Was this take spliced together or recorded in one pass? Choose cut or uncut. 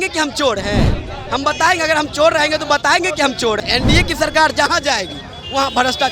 cut